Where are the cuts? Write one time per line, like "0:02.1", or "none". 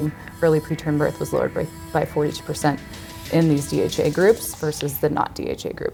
none